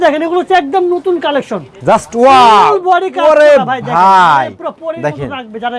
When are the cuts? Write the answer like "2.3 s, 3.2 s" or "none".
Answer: none